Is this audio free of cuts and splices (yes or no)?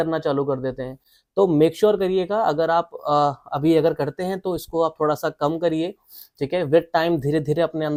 yes